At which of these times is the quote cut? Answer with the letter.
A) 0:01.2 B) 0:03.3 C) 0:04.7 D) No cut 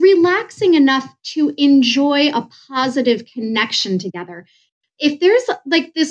C